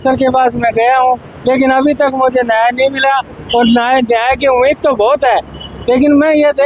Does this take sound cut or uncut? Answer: uncut